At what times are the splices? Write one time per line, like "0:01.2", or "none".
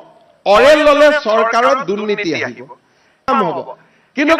0:03.3